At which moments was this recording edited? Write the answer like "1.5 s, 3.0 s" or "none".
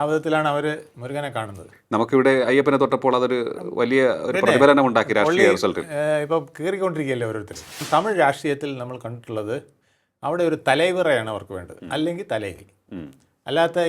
7.8 s